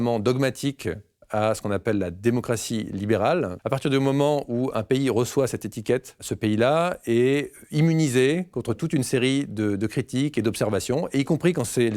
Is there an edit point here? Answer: yes; 2 cuts; at 3.6 s, 6.3 s

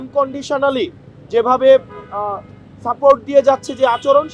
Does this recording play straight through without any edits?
yes; 0 cuts

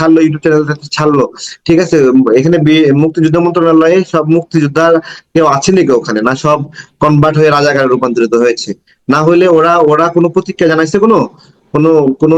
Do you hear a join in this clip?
no; 0 cuts

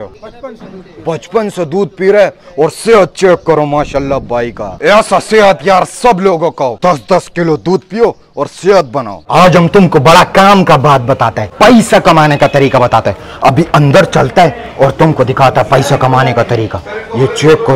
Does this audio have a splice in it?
no; 0 cuts

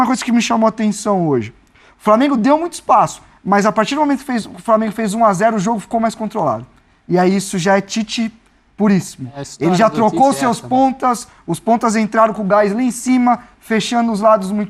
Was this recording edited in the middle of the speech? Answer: no; 0 cuts

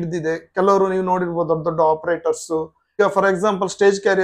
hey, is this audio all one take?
no; 1 cut; at 2.9 s

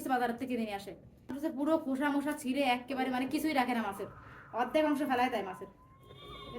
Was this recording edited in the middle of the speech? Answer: yes; 1 cut; at 1.4 s

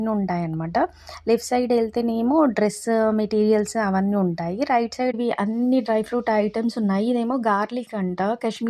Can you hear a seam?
yes; 1 cut; at 5.1 s

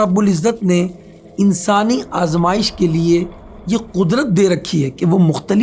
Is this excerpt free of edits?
yes; 0 cuts

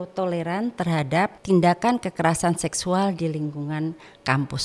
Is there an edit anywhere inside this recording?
yes; 1 cut; at 1.4 s

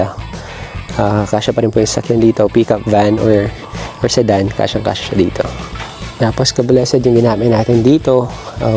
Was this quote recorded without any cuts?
no; 1 cut; at 6.0 s

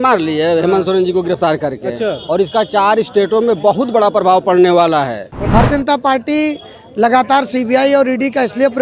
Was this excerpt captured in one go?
no; 1 cut; at 5.4 s

